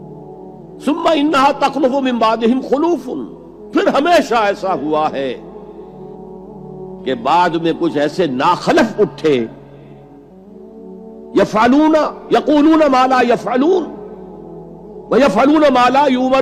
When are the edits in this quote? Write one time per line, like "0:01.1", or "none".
none